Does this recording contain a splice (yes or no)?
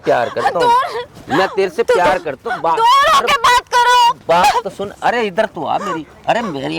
no